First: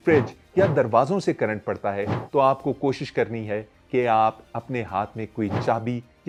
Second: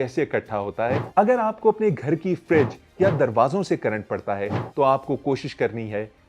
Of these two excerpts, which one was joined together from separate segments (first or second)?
second